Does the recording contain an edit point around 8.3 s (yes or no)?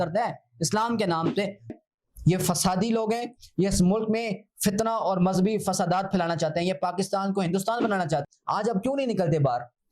yes